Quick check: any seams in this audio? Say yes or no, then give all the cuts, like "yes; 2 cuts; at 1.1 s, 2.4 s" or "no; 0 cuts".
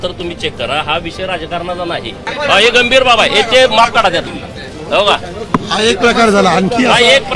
yes; 2 cuts; at 2.2 s, 4.3 s